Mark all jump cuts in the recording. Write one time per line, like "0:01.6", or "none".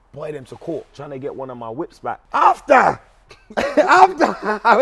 0:01.0
0:02.2